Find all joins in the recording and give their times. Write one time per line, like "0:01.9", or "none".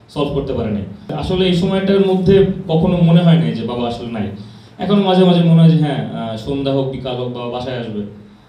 0:01.0